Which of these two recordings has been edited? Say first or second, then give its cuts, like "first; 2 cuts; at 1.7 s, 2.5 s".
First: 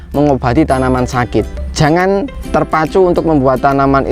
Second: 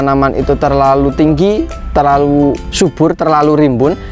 second; 1 cut; at 1.8 s